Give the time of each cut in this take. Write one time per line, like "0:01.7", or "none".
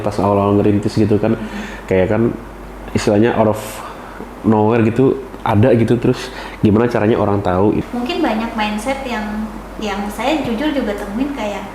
0:07.8